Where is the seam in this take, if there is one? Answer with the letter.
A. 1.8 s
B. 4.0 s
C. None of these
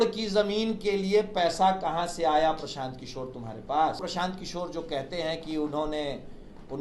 B